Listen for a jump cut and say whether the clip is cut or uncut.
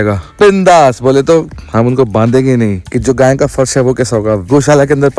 cut